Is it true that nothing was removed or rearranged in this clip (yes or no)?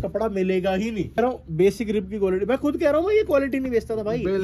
no